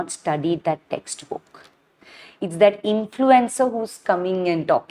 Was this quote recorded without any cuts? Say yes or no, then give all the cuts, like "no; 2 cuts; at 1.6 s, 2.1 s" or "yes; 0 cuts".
yes; 0 cuts